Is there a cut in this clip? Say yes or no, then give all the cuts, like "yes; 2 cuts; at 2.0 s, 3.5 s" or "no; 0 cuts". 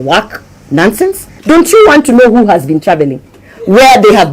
yes; 1 cut; at 1.3 s